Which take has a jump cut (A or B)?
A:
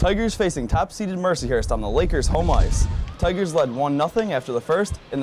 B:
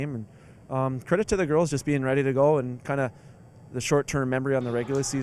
B